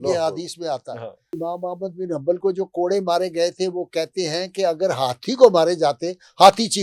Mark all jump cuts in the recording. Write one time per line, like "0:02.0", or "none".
0:01.4